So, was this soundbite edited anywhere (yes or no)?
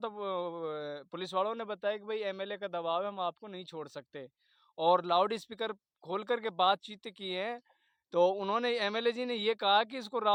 no